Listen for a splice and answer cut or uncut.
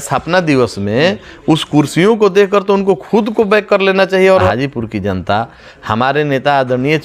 cut